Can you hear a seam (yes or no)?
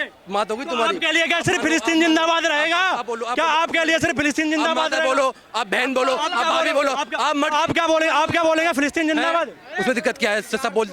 no